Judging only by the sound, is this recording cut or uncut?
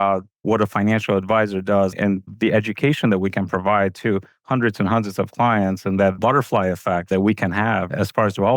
cut